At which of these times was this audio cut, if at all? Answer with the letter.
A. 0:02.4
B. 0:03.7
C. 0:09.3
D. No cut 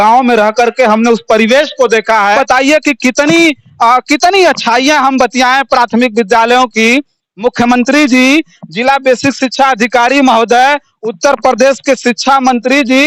A